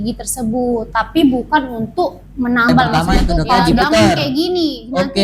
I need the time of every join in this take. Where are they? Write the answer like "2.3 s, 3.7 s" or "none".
3.4 s